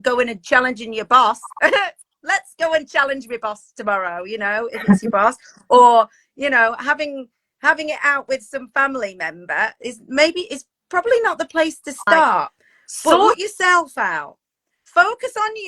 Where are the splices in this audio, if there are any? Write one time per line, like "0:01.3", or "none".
0:13.1